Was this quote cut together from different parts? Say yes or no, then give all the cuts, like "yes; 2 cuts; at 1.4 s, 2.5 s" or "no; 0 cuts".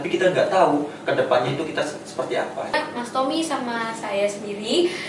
yes; 1 cut; at 2.7 s